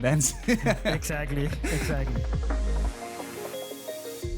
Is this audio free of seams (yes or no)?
no